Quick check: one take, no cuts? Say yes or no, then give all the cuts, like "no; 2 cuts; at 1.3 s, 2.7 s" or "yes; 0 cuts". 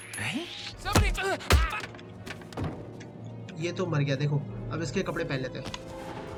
yes; 0 cuts